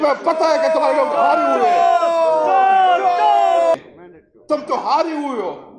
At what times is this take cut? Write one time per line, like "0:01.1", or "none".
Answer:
0:03.7

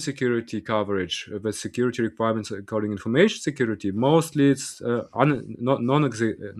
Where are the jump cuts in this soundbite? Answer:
none

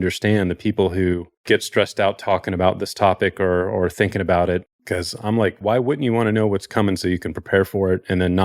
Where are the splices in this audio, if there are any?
0:01.3
0:05.6

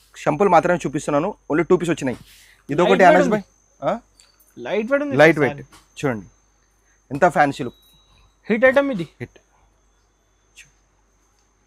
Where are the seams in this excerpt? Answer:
none

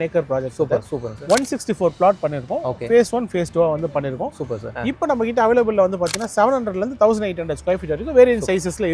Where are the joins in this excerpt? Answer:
0:04.7

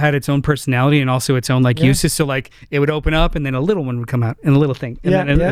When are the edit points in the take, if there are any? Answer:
none

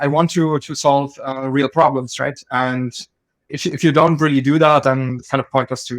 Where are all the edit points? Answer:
0:03.5
0:05.2

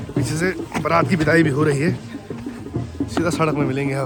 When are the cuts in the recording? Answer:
none

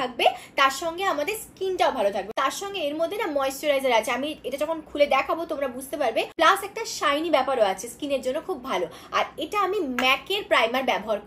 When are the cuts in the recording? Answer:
none

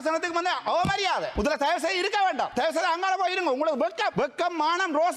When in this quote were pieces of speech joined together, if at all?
0:01.3
0:02.5
0:04.1

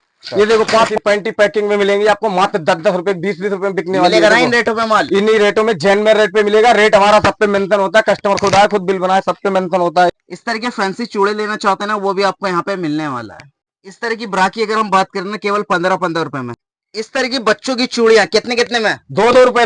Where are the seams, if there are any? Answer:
0:01.0

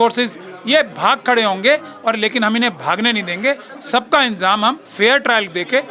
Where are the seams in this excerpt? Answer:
none

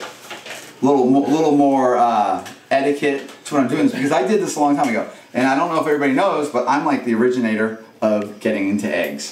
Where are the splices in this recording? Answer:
none

